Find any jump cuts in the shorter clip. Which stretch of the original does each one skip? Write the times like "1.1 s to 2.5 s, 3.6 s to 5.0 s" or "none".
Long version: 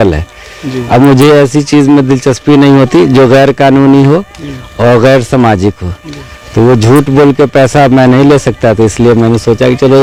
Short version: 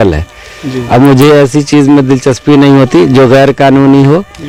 none